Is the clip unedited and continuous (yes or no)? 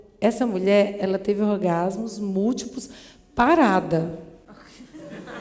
yes